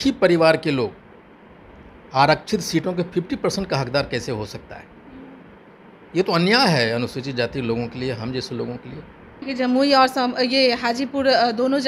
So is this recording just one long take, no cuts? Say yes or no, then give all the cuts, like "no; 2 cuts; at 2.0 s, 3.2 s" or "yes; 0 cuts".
no; 1 cut; at 9.4 s